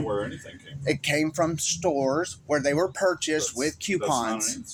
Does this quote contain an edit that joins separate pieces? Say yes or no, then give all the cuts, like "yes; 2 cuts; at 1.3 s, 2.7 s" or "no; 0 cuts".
no; 0 cuts